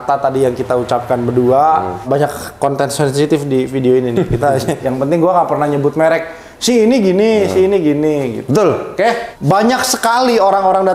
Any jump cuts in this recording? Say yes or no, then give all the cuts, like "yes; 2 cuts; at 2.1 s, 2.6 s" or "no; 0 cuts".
yes; 3 cuts; at 2.0 s, 4.8 s, 9.3 s